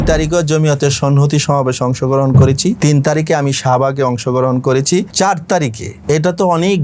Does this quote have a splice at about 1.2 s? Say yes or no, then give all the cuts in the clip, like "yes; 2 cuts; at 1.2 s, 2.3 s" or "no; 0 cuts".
no; 3 cuts; at 2.8 s, 5.1 s, 5.9 s